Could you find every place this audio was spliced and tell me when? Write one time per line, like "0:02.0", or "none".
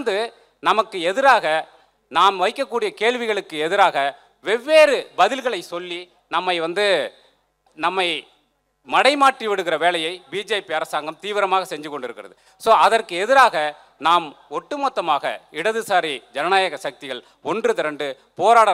none